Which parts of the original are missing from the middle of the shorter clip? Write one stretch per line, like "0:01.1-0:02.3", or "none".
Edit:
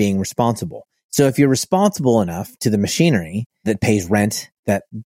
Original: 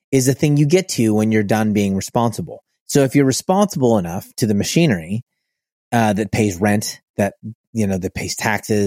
0:05.4-0:06.2